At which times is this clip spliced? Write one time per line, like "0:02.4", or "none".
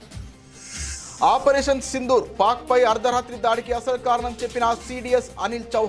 0:01.2